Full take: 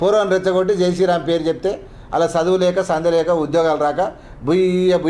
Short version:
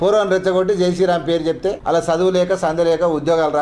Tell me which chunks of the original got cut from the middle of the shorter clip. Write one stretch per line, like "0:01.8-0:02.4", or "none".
0:01.8-0:02.1